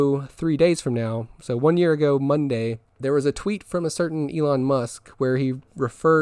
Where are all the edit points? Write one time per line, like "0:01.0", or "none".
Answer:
0:02.9